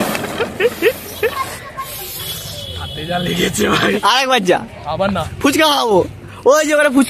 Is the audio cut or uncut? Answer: cut